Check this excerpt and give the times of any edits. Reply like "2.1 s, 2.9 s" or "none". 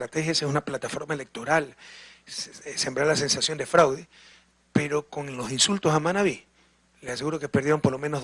6.6 s